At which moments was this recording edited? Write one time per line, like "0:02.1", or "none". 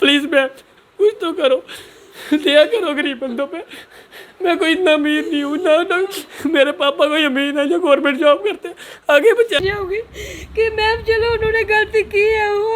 0:09.6